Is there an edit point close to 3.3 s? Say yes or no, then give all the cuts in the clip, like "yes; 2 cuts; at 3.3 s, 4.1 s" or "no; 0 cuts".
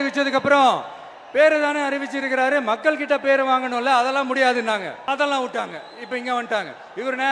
no; 1 cut; at 5.1 s